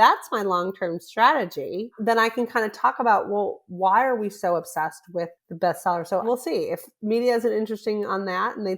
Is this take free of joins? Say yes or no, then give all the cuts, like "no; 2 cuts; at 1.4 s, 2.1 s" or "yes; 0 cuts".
no; 3 cuts; at 1.9 s, 5.4 s, 6.2 s